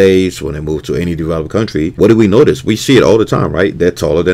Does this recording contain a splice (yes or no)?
yes